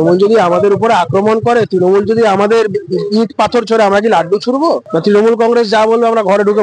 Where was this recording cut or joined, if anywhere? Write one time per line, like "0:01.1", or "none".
none

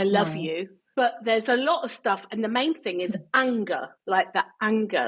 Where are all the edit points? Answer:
0:00.9

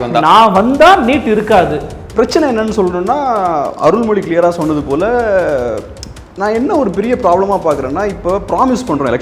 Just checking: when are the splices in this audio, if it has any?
0:02.0

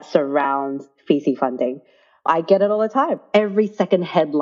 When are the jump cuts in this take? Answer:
0:03.2

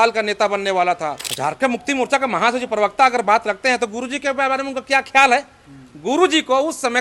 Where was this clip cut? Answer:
0:01.3

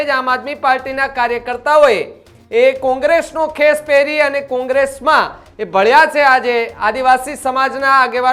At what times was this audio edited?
none

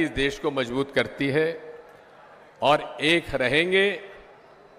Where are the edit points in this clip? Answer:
none

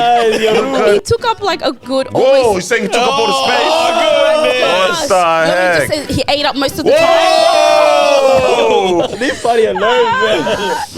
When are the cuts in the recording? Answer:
0:00.9
0:09.1

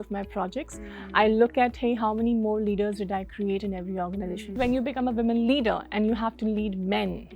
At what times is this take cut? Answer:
0:04.5

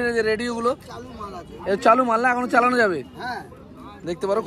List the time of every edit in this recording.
none

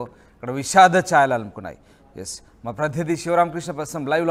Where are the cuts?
none

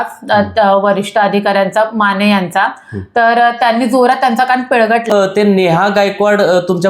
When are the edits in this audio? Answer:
0:05.1

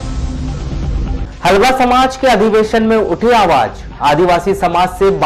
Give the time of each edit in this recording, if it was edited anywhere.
0:01.1

